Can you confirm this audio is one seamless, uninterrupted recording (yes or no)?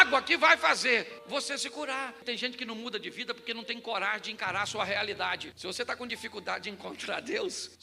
no